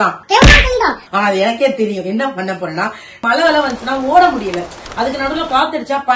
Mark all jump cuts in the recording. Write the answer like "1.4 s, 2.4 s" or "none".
3.1 s